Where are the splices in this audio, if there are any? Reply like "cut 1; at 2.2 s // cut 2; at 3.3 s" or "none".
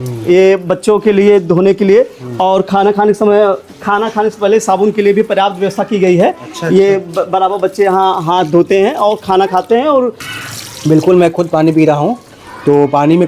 cut 1; at 10.3 s